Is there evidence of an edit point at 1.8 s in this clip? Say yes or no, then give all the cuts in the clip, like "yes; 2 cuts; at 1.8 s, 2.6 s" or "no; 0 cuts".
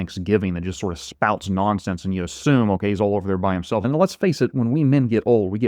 no; 1 cut; at 3.8 s